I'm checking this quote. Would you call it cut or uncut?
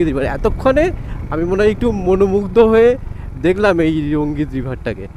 uncut